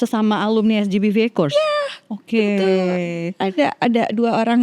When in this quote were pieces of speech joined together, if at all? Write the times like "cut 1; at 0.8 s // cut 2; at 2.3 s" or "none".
none